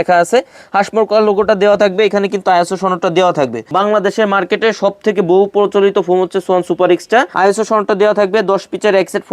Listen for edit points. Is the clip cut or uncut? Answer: cut